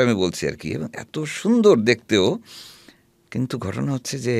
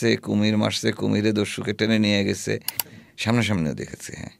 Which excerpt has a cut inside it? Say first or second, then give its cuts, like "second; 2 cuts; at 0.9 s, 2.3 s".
second; 1 cut; at 2.9 s